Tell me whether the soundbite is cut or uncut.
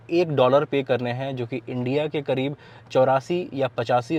uncut